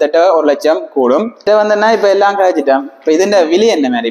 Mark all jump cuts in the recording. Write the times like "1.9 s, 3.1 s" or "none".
1.3 s